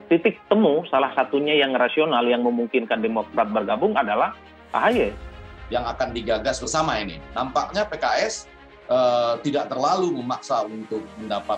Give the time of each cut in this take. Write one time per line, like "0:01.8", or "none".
0:05.5